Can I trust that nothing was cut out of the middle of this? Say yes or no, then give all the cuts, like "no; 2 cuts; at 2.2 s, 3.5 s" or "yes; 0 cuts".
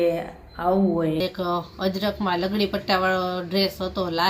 no; 1 cut; at 1.2 s